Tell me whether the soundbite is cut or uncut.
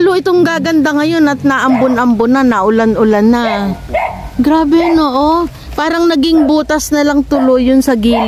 uncut